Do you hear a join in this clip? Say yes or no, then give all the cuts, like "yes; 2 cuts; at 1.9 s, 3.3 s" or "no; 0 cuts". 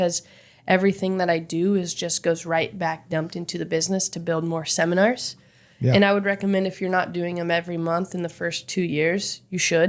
no; 0 cuts